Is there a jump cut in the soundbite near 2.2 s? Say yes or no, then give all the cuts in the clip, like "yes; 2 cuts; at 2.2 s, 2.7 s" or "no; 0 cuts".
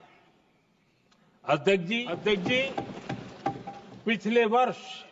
yes; 1 cut; at 2.2 s